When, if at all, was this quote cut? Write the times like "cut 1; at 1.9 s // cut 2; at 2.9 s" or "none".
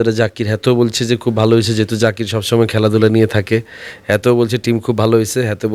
none